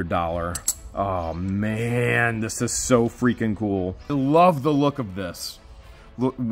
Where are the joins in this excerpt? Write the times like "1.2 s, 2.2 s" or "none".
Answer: 4.1 s